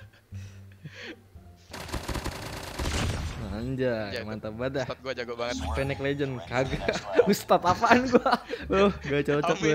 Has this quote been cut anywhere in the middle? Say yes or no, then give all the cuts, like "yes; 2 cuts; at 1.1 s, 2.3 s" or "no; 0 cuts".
no; 0 cuts